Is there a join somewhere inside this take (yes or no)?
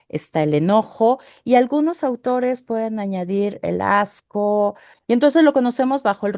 yes